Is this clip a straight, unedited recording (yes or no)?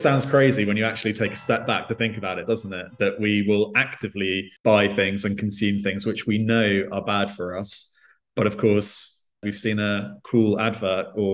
yes